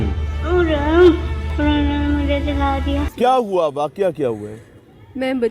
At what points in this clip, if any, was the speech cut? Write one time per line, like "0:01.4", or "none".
0:03.1